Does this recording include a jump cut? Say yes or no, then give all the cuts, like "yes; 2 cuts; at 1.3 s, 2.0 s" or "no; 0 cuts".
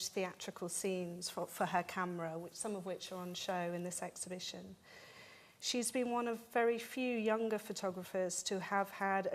no; 0 cuts